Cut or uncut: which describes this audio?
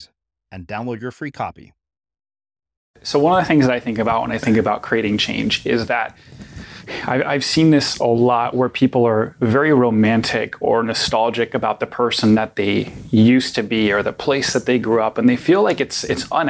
cut